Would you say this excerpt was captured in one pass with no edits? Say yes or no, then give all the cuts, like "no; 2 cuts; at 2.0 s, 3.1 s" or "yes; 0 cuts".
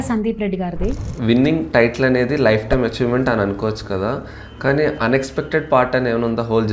no; 1 cut; at 1.1 s